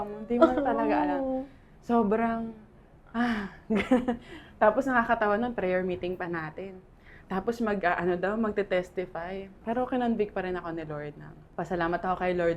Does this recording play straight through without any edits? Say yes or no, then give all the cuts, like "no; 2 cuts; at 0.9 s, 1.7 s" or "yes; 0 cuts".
yes; 0 cuts